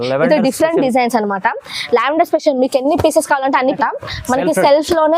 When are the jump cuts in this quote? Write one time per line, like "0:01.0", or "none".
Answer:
0:03.8